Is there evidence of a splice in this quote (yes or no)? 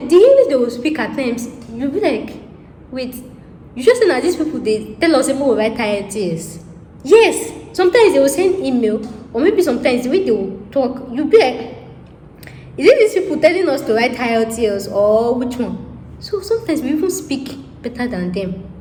no